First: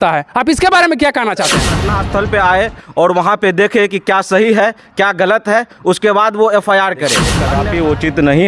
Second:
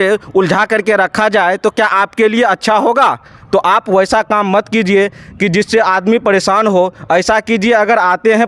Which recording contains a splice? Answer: first; 2 cuts; at 1.9 s, 7.4 s

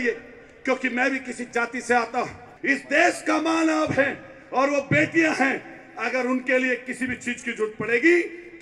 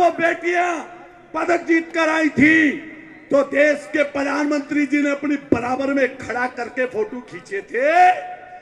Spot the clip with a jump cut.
first; 1 cut; at 2.5 s

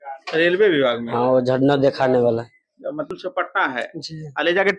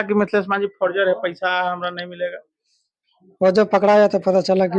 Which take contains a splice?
first; 1 cut; at 3.1 s

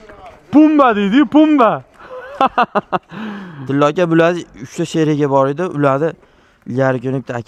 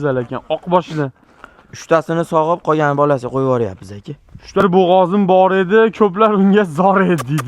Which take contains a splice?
second; 1 cut; at 4.6 s

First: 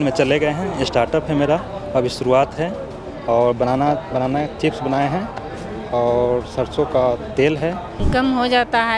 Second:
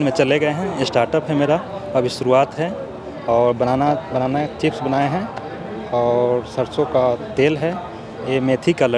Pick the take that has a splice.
first; 1 cut; at 7.9 s

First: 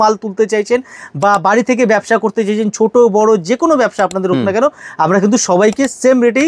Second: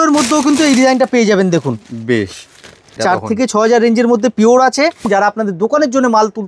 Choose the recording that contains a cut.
second; 2 cuts; at 3.0 s, 5.1 s

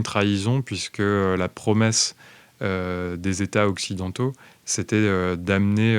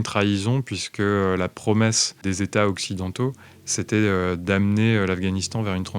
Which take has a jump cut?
second; 1 cut; at 2.2 s

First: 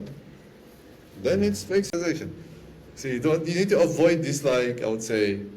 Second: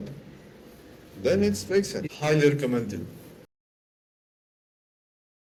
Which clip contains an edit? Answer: first; 1 cut; at 1.9 s

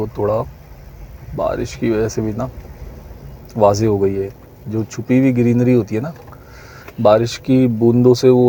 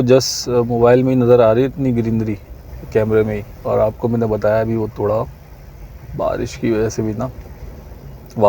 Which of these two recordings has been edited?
second; 1 cut; at 3.5 s

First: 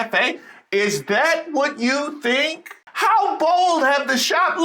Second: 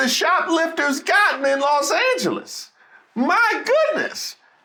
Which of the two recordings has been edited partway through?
first; 1 cut; at 2.8 s

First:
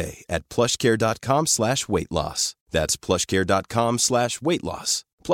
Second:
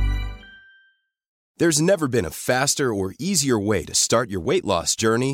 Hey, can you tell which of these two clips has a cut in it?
second; 1 cut; at 1.4 s

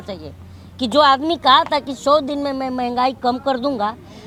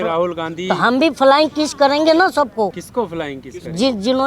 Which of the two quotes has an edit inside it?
second; 1 cut; at 2.8 s

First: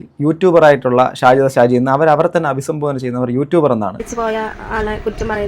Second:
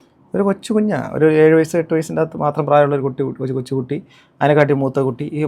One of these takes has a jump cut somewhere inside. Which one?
first; 1 cut; at 4.0 s

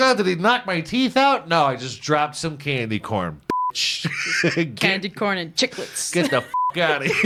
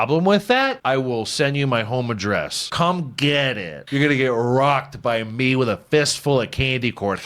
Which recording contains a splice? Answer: second; 3 cuts; at 0.8 s, 2.6 s, 3.7 s

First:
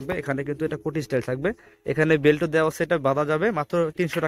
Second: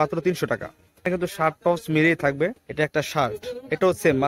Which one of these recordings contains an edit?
second; 2 cuts; at 1.1 s, 2.6 s

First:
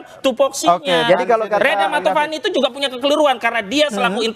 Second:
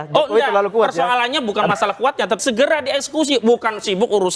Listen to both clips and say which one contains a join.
second; 1 cut; at 2.4 s

